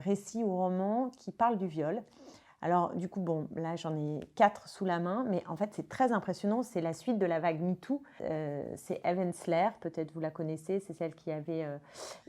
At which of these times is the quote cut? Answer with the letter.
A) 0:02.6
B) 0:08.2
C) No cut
B